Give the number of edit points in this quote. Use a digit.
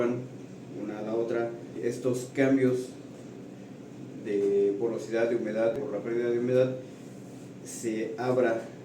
2